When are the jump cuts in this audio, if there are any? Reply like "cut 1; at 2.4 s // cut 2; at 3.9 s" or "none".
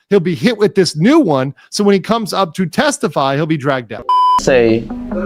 cut 1; at 4.3 s